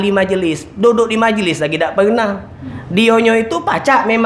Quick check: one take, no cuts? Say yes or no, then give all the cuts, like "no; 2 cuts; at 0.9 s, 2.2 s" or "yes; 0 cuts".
yes; 0 cuts